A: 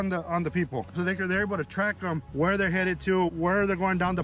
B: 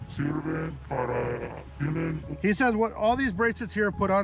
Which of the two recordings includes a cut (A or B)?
A